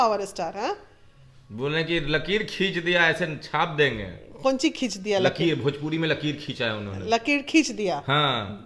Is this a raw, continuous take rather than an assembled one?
yes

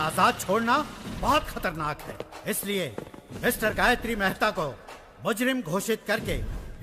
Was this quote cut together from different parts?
no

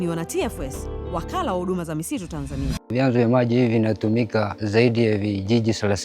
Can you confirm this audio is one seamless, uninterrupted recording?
no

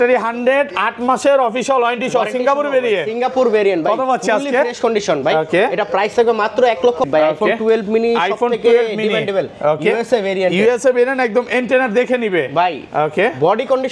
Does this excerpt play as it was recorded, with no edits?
no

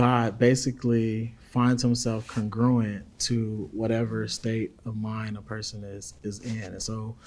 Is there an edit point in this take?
no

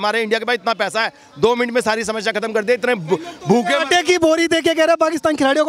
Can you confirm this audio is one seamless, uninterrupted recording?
yes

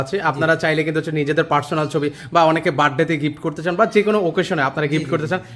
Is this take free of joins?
yes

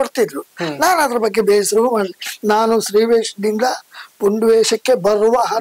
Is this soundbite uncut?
yes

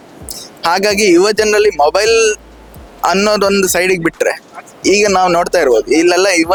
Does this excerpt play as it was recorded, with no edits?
yes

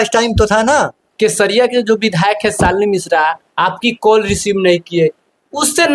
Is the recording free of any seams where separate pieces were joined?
no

